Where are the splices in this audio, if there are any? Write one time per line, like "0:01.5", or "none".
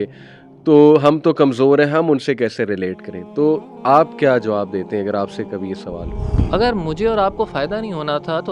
0:06.4